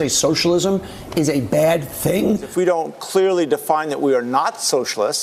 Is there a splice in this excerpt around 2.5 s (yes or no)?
yes